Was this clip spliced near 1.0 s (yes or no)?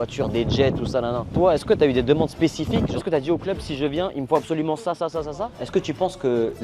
no